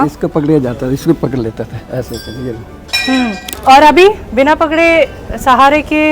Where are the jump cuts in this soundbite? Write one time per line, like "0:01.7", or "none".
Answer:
0:03.5